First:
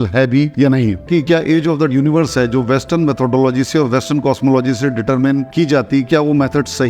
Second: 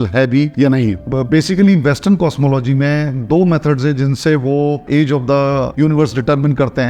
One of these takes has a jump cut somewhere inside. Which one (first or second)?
first